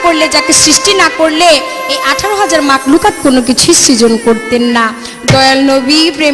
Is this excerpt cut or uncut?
uncut